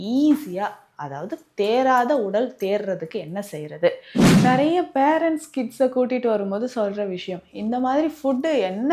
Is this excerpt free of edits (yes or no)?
no